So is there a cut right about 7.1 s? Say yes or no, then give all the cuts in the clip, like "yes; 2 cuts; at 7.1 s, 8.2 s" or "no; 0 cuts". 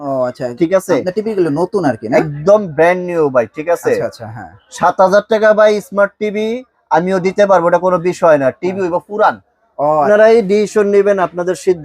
no; 1 cut; at 10.1 s